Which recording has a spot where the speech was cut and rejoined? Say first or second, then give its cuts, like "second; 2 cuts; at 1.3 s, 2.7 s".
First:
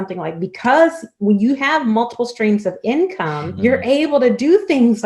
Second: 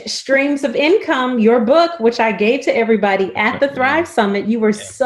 first; 1 cut; at 3.4 s